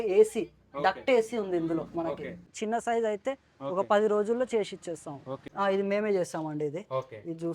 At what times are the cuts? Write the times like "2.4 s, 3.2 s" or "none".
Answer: 2.5 s, 5.5 s

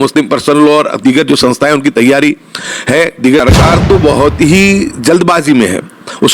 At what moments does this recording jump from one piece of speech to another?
3.4 s

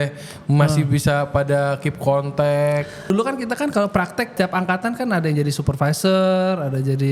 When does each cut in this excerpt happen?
3.1 s, 4.3 s

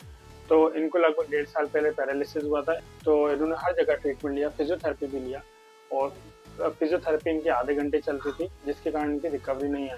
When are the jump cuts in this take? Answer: 2.8 s

